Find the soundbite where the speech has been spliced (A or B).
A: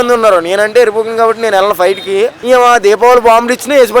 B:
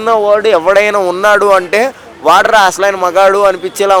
A